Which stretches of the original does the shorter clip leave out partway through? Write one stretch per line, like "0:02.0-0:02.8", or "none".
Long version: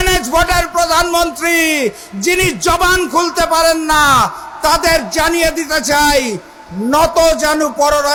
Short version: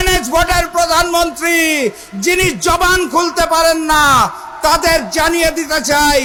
none